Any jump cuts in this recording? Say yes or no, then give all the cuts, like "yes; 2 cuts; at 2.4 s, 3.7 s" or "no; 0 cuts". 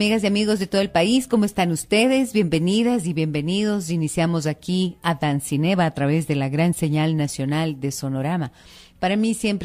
no; 0 cuts